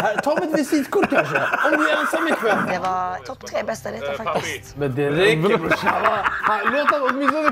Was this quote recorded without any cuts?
no; 2 cuts; at 2.8 s, 4.7 s

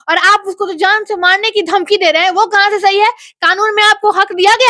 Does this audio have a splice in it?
no; 0 cuts

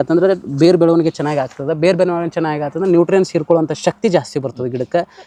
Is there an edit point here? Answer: no; 0 cuts

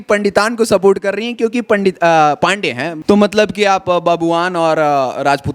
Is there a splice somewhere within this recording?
yes; 1 cut; at 2.9 s

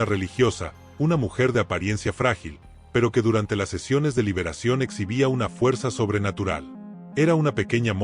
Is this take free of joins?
yes; 0 cuts

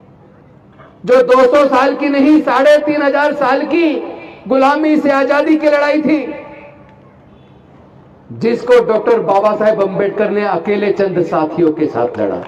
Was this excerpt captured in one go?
yes; 0 cuts

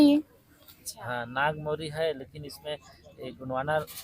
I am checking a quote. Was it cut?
yes; 1 cut; at 0.9 s

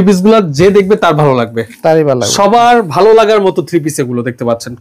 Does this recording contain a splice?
no; 0 cuts

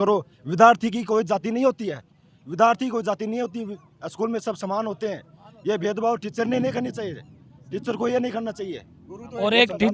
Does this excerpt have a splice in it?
no; 0 cuts

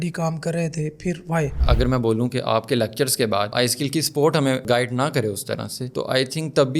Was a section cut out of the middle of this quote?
yes; 3 cuts; at 1.6 s, 3.5 s, 4.6 s

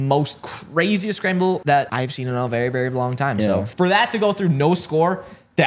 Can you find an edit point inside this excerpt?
yes; 2 cuts; at 1.7 s, 3.7 s

